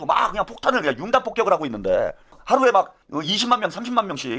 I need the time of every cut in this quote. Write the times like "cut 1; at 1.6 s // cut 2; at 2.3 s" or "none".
cut 1; at 2.4 s // cut 2; at 3.0 s